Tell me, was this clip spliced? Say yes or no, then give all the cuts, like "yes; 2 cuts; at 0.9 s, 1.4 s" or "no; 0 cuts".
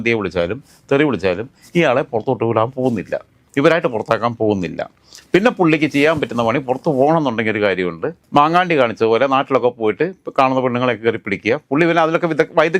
no; 0 cuts